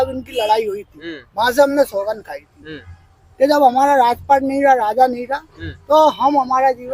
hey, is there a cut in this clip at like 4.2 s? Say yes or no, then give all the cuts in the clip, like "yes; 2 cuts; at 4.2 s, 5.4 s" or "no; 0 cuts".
no; 0 cuts